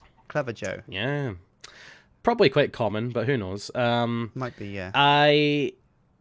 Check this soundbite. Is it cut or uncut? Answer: uncut